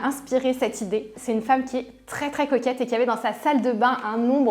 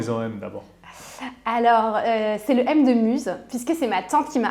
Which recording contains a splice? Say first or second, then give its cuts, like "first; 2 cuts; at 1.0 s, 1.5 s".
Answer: first; 1 cut; at 1.2 s